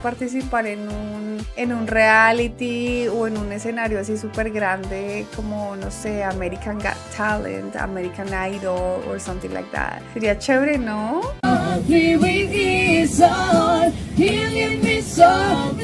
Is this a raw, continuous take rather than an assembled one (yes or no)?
yes